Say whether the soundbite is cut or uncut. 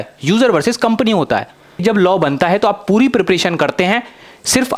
cut